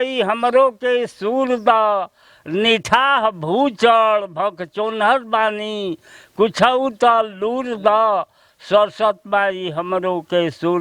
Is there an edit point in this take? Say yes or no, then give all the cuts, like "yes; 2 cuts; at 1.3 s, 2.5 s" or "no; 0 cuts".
no; 0 cuts